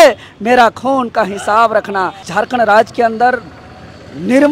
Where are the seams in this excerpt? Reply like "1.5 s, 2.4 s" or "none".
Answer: 2.2 s